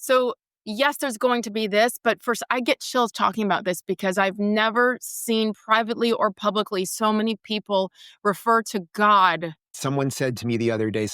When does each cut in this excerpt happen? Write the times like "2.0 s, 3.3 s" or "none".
9.7 s